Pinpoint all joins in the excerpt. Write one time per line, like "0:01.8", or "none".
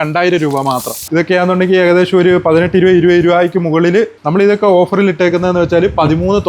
0:01.0
0:04.2

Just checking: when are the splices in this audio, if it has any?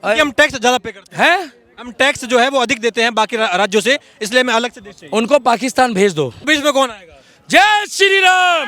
0:06.5

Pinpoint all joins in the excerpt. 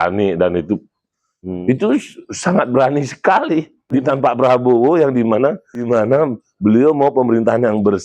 0:03.9
0:06.0

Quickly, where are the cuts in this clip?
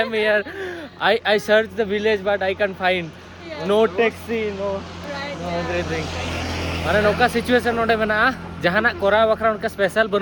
none

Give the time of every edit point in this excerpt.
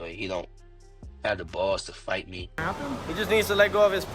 0:02.6

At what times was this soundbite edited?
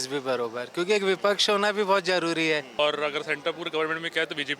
0:02.8

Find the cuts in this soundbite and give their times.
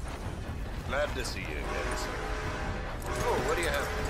none

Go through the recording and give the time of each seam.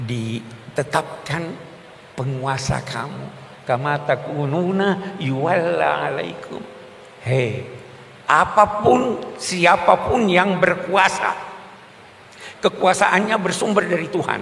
none

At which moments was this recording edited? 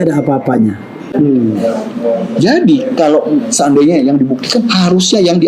0:01.0

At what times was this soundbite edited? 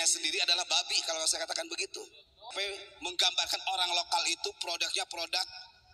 0:02.5

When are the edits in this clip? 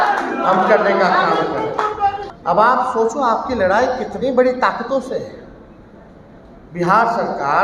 0:02.3

